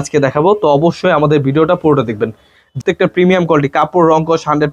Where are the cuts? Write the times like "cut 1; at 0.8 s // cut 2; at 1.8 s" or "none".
cut 1; at 2.8 s